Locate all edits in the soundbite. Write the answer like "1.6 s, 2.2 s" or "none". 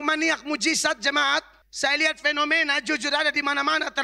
1.6 s